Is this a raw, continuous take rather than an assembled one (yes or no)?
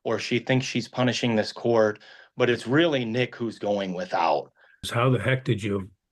no